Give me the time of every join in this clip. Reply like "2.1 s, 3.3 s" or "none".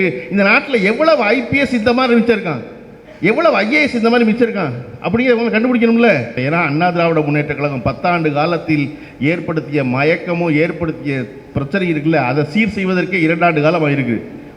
6.4 s